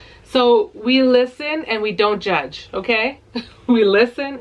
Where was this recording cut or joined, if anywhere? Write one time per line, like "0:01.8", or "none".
none